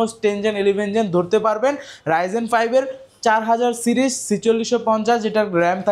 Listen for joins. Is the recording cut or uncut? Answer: uncut